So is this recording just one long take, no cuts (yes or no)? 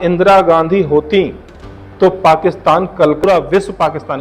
no